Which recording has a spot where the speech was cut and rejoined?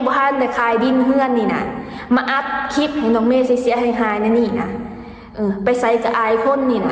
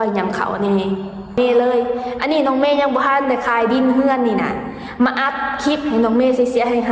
second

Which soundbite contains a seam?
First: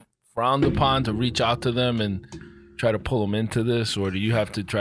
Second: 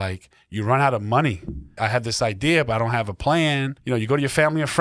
second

